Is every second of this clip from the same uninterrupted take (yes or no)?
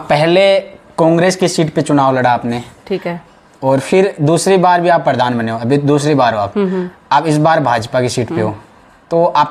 yes